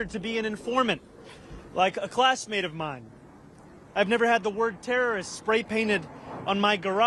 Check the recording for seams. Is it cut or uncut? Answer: uncut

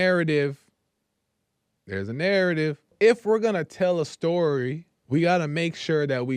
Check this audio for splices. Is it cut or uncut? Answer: cut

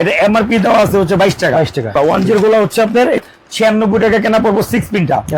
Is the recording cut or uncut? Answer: cut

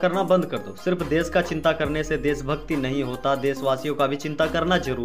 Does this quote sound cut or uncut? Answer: uncut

